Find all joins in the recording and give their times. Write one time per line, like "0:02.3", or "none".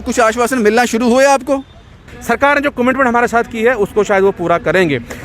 0:02.1